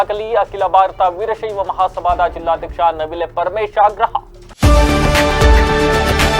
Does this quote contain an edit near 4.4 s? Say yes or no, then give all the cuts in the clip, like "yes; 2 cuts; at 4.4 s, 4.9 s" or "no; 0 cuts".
yes; 1 cut; at 4.4 s